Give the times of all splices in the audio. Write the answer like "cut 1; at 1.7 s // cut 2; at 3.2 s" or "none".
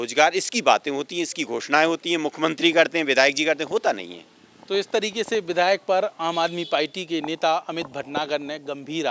none